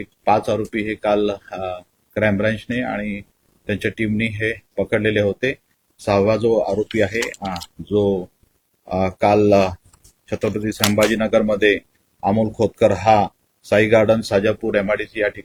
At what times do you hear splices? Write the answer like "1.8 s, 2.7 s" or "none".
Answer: none